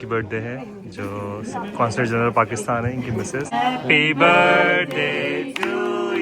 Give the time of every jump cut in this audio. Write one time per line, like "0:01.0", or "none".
0:03.5